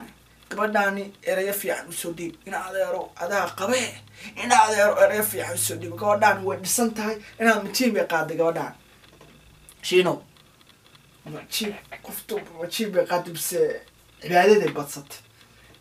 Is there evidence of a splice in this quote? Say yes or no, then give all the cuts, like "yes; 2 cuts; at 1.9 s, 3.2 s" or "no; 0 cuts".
no; 0 cuts